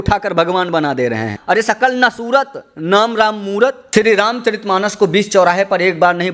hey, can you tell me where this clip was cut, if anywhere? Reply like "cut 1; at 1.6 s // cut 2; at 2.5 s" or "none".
cut 1; at 1.3 s // cut 2; at 3.8 s

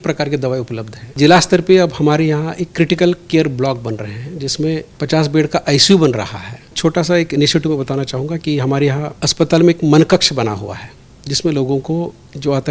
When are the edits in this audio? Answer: cut 1; at 1.1 s // cut 2; at 4.9 s // cut 3; at 6.7 s // cut 4; at 9.2 s

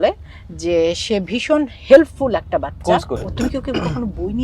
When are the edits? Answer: cut 1; at 3.3 s

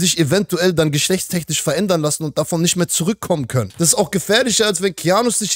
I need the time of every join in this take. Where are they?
cut 1; at 3.6 s

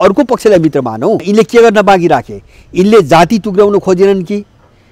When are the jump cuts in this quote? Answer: cut 1; at 1.2 s

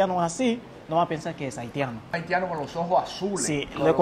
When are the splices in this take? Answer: none

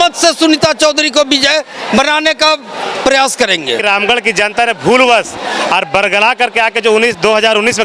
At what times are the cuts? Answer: cut 1; at 3.8 s

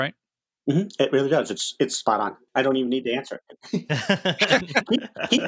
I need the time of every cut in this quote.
cut 1; at 2.4 s

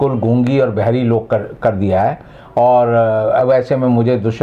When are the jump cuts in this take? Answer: none

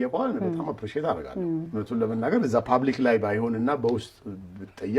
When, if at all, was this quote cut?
cut 1; at 1.7 s

